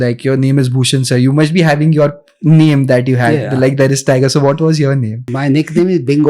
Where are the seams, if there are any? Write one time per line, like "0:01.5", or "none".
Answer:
0:05.3

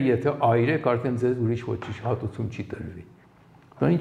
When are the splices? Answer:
none

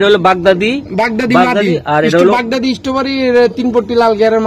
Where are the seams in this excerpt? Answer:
none

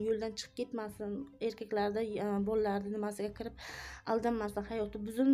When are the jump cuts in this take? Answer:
none

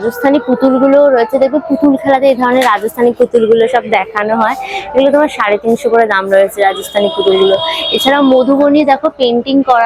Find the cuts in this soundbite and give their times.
none

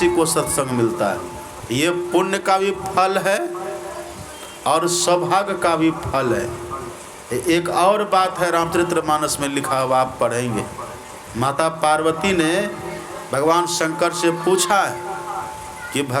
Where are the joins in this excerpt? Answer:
0:01.5
0:11.5

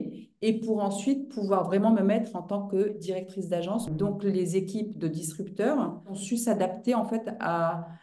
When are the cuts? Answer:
0:03.9
0:06.2

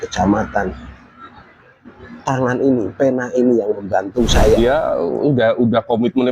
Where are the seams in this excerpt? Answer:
0:04.6

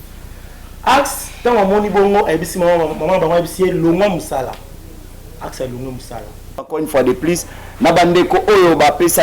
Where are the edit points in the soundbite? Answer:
0:06.7

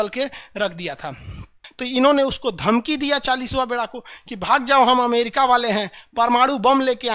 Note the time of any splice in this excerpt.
0:01.6

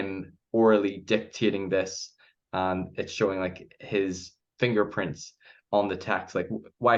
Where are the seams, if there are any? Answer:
none

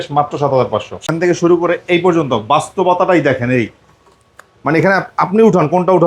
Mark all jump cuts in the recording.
0:01.1

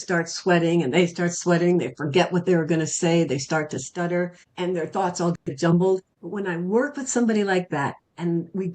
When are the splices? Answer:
0:04.4
0:06.2

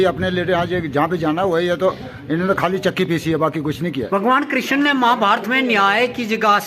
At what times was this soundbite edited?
0:04.0

